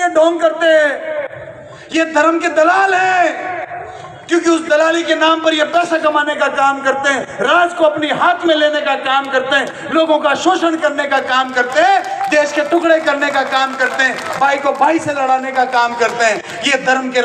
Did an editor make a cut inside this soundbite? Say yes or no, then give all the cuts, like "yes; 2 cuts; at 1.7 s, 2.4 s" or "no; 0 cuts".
no; 0 cuts